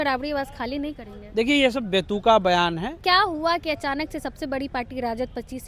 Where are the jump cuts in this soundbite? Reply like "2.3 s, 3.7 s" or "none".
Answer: 3.0 s